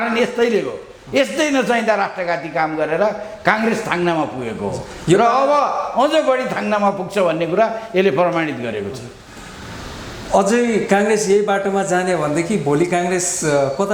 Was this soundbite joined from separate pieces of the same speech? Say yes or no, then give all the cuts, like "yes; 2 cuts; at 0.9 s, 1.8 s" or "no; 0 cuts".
no; 0 cuts